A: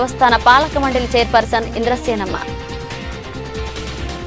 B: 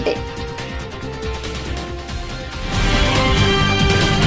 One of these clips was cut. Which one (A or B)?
A